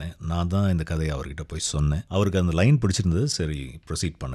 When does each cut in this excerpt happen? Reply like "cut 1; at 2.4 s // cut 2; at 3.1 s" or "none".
cut 1; at 2.0 s